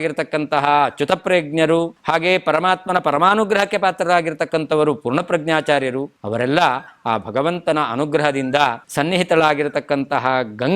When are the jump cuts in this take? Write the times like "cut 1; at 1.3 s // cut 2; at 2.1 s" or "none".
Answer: cut 1; at 2.0 s // cut 2; at 6.2 s // cut 3; at 8.8 s